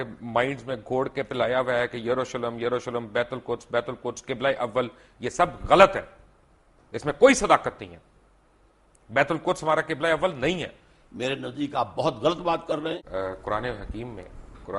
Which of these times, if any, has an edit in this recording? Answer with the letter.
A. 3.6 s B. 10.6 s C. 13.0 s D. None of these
C